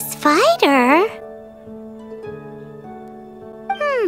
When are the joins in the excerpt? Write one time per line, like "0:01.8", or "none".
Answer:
none

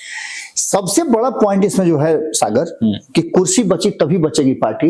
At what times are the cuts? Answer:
none

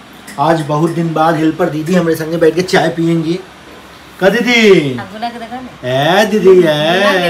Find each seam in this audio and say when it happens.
none

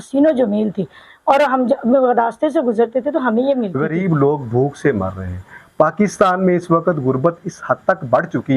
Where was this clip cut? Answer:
0:03.8

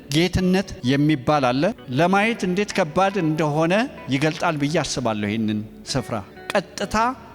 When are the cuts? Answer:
0:01.8

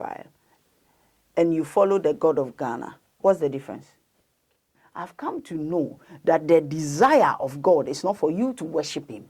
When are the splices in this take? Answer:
0:04.8

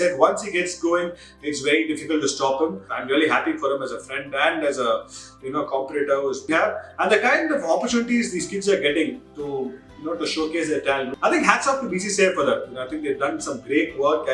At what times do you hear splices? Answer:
0:02.9
0:06.5
0:11.1

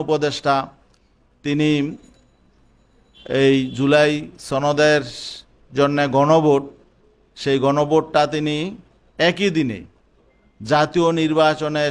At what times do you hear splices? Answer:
none

